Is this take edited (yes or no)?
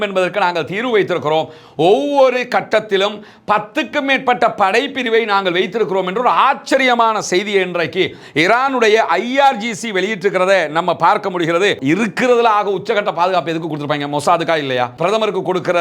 yes